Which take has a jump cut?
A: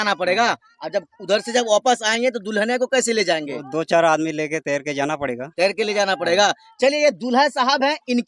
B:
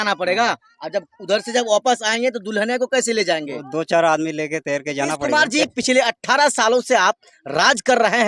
B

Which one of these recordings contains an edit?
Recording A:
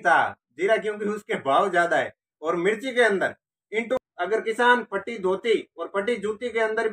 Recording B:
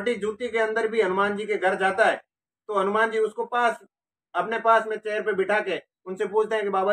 A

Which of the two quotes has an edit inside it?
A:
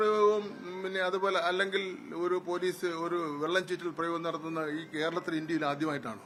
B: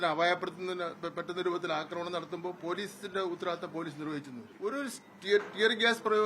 B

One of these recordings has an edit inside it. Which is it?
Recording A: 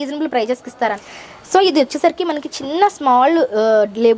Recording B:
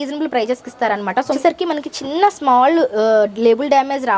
B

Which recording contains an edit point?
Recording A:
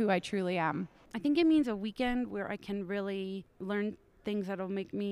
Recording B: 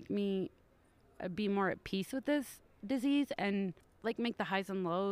A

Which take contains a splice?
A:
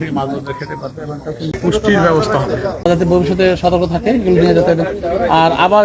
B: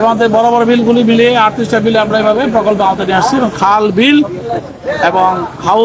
A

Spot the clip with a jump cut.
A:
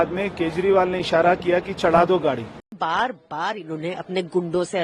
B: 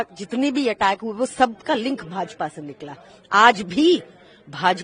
A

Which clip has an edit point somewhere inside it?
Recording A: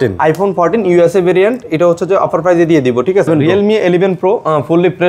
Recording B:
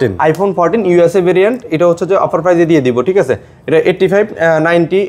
A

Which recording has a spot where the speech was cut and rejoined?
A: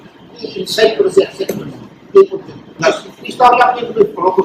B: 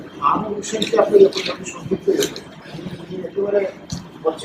A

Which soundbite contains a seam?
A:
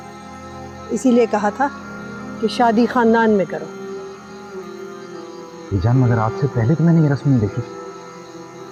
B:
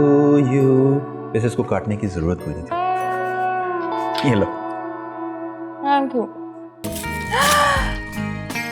B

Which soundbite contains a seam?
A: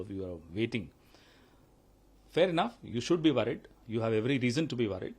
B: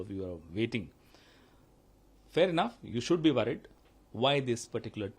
B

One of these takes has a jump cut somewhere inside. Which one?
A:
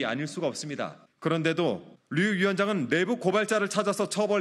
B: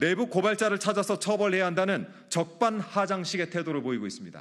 A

